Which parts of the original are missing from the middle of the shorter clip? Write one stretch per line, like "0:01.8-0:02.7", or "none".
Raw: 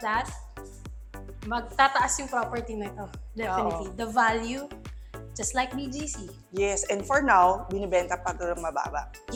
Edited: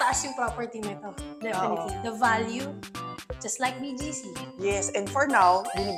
none